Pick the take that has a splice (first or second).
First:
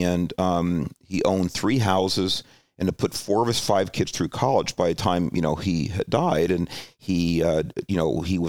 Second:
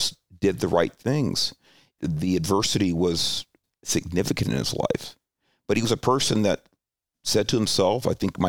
second